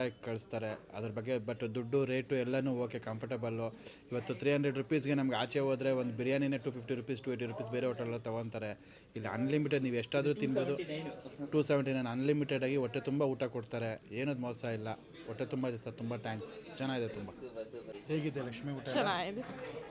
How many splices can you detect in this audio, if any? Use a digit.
0